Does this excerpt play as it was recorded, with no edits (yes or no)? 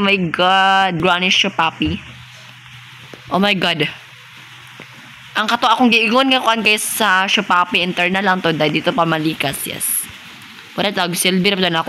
no